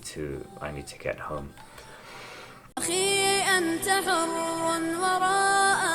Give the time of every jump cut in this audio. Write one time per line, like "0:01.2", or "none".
0:02.5